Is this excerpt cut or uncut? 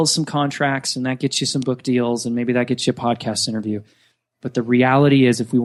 uncut